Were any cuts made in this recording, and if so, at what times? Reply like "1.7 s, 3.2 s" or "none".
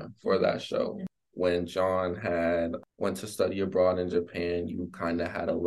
1.0 s, 2.8 s